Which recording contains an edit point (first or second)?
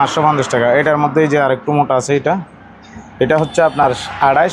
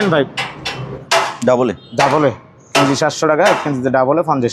second